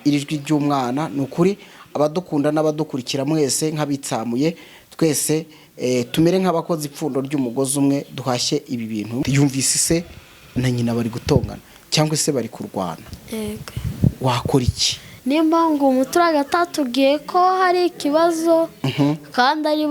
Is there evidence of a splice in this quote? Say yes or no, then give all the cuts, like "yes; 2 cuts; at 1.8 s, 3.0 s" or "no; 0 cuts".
yes; 2 cuts; at 9.2 s, 15.1 s